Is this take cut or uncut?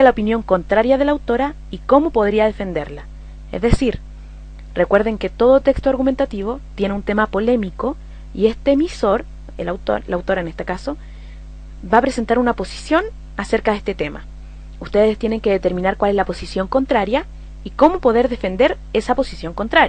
uncut